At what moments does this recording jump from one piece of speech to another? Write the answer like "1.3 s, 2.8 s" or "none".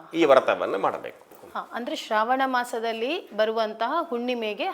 1.3 s